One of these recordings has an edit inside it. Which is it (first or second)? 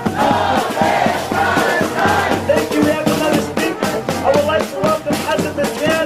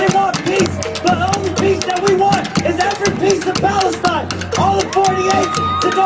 first